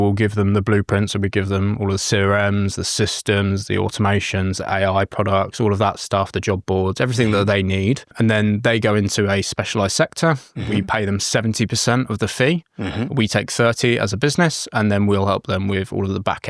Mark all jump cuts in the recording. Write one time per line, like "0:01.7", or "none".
0:08.1